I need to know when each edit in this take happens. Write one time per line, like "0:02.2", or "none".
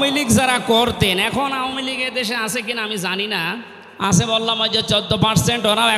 0:03.8